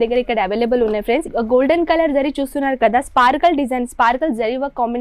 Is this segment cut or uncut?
cut